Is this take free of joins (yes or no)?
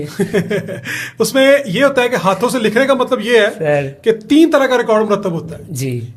yes